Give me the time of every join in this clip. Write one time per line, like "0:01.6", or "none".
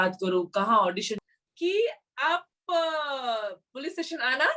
0:01.2

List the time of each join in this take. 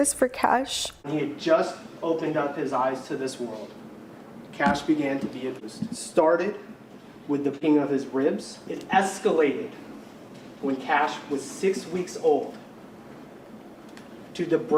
0:01.1
0:05.6
0:07.6

